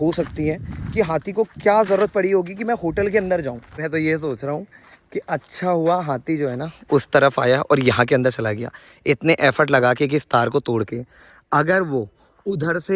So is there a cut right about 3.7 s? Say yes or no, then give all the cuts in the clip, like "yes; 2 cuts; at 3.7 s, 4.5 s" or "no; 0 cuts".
yes; 1 cut; at 3.7 s